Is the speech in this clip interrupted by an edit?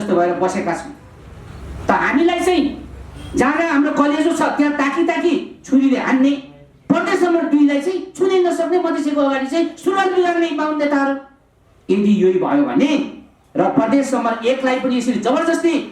no; 0 cuts

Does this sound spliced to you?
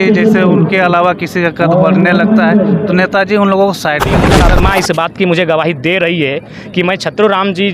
yes; 1 cut; at 4.3 s

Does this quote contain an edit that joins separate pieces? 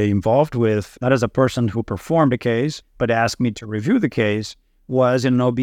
yes; 2 cuts; at 0.9 s, 2.8 s

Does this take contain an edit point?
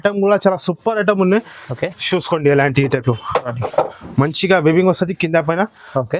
no; 0 cuts

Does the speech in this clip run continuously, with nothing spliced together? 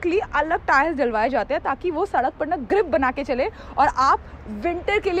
yes; 0 cuts

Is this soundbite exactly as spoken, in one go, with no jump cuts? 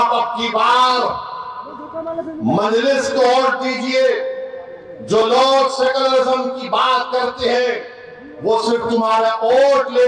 yes; 0 cuts

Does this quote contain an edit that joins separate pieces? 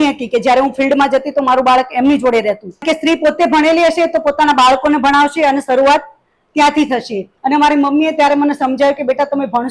yes; 2 cuts; at 2.8 s, 7.2 s

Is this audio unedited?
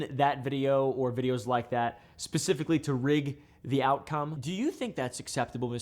no; 1 cut; at 4.4 s

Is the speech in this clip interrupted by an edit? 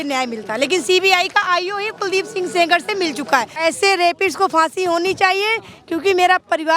yes; 1 cut; at 3.5 s

